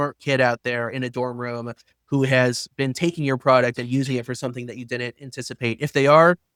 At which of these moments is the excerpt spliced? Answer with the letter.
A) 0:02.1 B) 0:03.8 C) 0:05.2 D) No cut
D